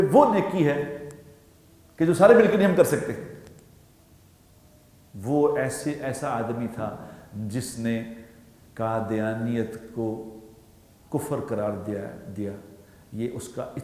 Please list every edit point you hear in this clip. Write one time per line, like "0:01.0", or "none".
none

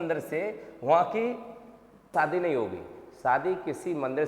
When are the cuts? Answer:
0:02.1

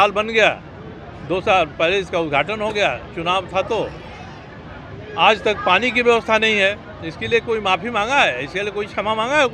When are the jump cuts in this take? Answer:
none

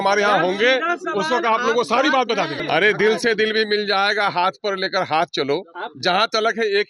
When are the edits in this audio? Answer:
0:02.6

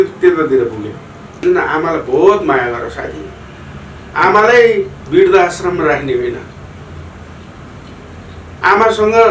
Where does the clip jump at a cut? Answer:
0:01.4

